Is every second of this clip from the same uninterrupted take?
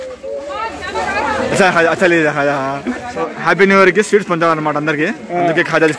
no; 1 cut; at 3.3 s

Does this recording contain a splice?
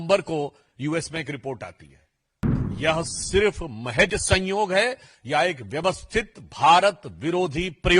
yes; 1 cut; at 2.5 s

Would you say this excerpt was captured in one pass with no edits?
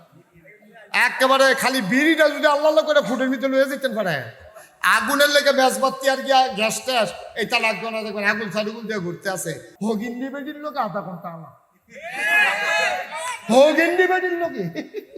no; 1 cut; at 9.7 s

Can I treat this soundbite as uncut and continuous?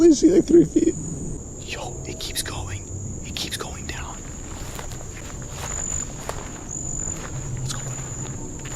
no; 2 cuts; at 1.4 s, 5.2 s

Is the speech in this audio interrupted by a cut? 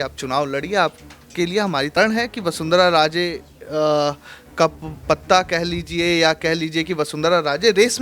yes; 1 cut; at 2.0 s

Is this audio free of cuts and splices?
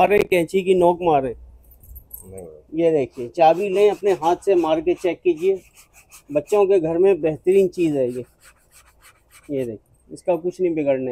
yes; 0 cuts

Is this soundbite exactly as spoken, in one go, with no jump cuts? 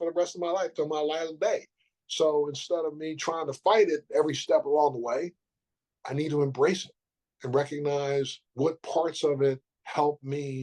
no; 2 cuts; at 8.4 s, 9.7 s

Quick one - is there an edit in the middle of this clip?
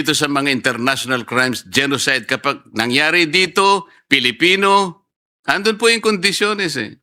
no; 0 cuts

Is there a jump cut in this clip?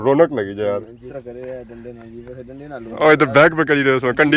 yes; 1 cut; at 1.1 s

